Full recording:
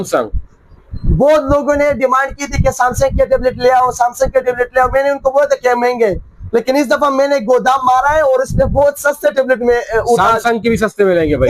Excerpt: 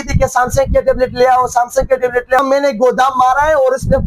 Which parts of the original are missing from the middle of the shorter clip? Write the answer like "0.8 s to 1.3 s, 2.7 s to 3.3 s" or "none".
4.8 s to 7.1 s